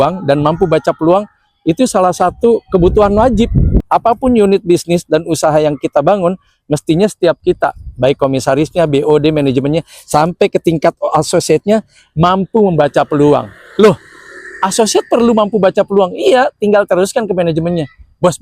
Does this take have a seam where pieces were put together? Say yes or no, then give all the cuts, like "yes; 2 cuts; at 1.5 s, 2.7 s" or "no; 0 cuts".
yes; 1 cut; at 3.8 s